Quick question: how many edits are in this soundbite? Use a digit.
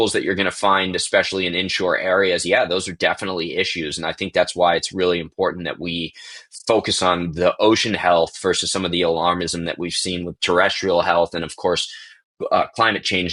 0